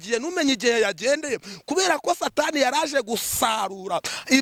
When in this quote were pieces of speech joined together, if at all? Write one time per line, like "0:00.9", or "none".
none

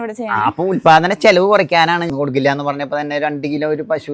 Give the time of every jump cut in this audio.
0:02.1

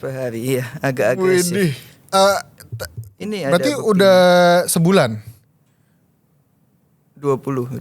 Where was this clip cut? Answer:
none

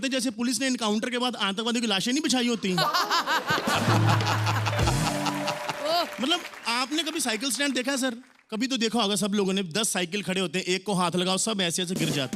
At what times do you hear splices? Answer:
none

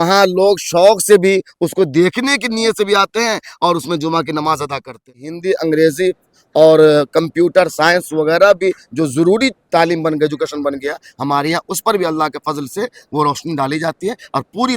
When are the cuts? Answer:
0:05.3

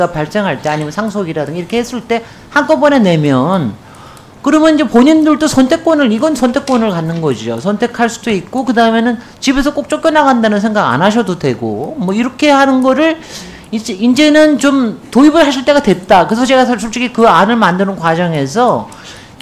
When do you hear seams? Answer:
none

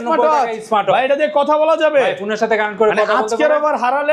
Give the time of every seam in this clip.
none

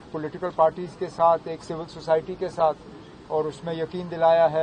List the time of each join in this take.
none

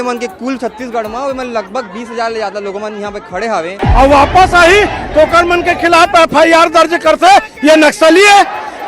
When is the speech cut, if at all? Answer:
0:03.8

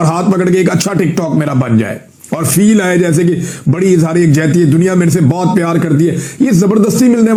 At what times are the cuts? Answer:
none

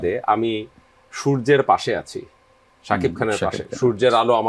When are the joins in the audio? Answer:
none

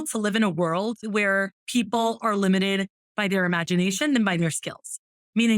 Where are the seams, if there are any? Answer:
0:01.0

